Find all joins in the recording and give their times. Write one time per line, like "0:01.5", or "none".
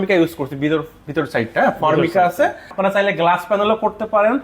0:02.7